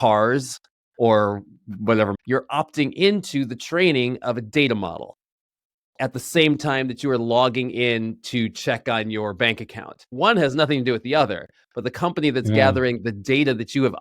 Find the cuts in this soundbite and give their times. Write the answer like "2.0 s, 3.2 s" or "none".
2.1 s, 10.1 s